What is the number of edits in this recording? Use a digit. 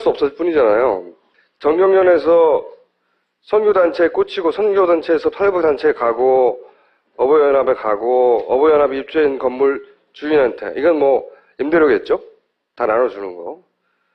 0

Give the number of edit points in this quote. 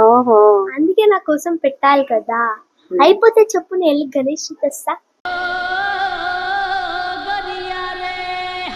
0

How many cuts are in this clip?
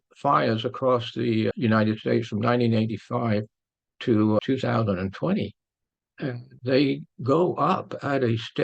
3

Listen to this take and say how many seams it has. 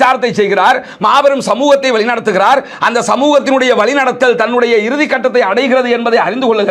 0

